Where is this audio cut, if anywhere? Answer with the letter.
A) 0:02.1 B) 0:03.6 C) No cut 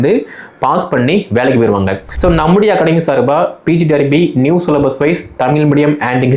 A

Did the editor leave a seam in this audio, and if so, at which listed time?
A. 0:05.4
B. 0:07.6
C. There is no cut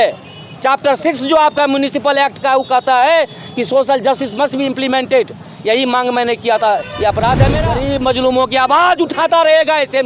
B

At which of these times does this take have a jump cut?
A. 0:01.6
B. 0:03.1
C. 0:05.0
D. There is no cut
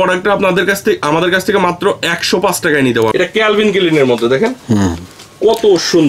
B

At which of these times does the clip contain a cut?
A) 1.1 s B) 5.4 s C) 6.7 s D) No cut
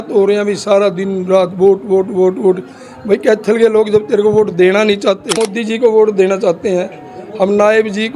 B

